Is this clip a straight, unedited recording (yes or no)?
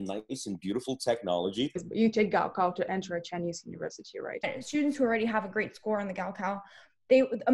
no